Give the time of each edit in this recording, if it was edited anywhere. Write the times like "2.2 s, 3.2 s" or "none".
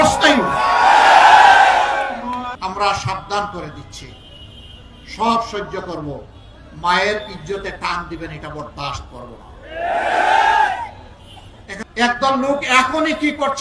2.5 s, 11.8 s